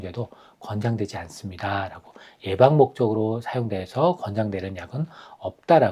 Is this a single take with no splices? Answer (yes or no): yes